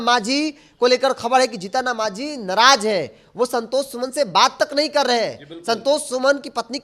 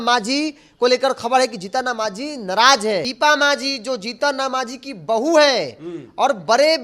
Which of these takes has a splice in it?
second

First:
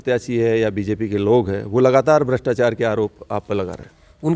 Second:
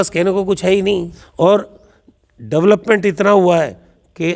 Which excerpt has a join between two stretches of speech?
second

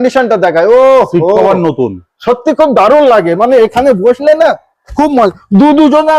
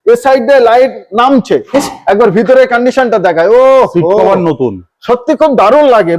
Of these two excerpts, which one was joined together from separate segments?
second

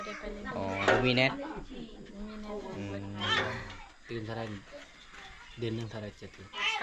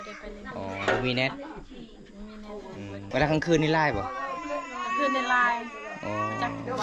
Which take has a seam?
second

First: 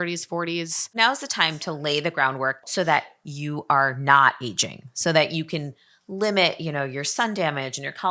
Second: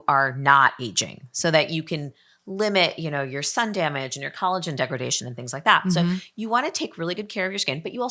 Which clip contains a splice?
first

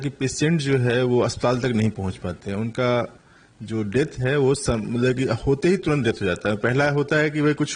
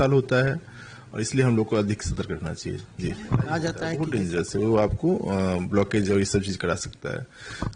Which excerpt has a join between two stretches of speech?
second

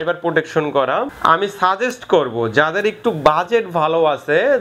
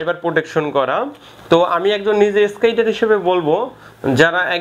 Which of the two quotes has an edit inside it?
first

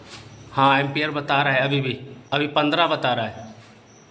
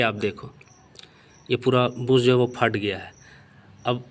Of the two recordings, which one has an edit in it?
first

